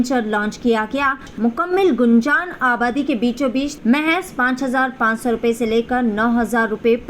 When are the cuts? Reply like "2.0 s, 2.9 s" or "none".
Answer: 1.3 s, 3.7 s